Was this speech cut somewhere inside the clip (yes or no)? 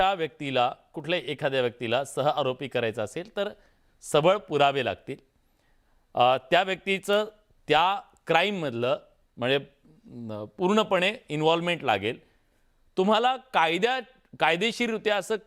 no